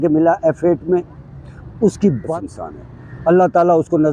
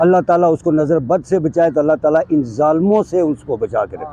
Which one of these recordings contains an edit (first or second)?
first